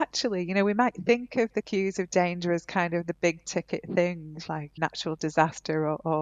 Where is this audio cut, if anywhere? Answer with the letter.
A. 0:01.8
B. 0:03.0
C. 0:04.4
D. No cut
C